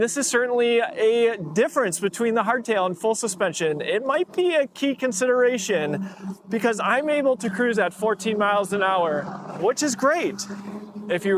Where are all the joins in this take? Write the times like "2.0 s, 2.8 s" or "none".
none